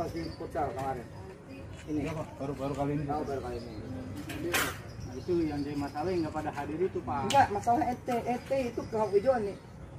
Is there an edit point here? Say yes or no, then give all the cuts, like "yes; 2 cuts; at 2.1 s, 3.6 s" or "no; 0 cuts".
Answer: no; 0 cuts